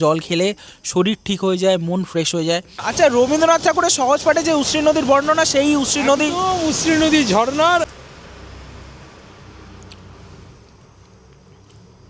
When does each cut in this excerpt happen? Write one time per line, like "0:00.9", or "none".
0:02.8
0:07.9